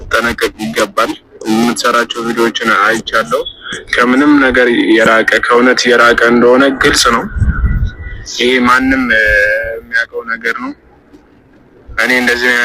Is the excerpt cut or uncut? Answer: uncut